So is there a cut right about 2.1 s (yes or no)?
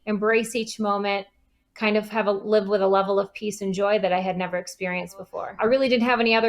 no